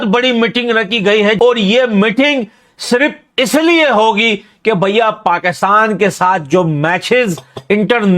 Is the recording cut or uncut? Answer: cut